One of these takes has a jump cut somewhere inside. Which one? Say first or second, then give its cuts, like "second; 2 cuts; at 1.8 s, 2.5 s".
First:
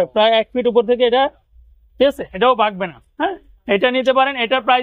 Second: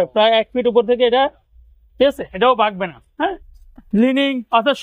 second; 1 cut; at 3.5 s